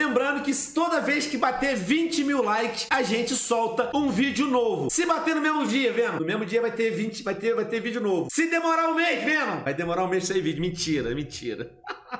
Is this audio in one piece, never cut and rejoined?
yes; 0 cuts

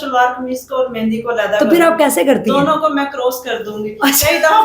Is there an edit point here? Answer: no; 0 cuts

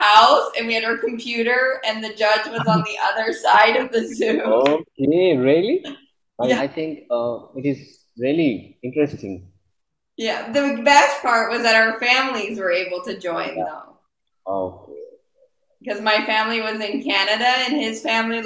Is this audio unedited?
no; 1 cut; at 6.6 s

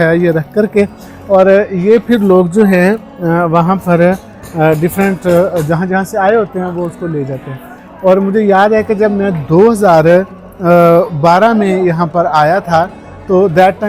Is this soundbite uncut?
yes; 0 cuts

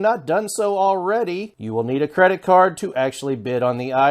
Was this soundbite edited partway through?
yes; 1 cut; at 1.5 s

